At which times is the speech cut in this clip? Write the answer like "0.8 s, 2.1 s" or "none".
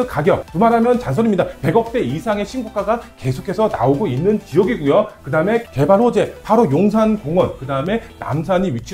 none